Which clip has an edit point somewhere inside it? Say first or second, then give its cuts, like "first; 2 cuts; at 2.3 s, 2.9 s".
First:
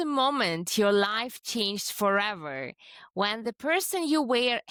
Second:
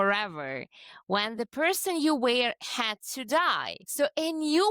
second; 1 cut; at 3.8 s